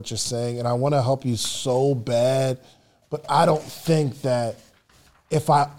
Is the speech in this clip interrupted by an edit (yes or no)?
no